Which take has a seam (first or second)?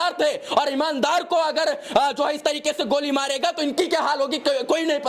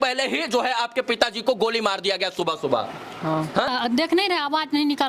second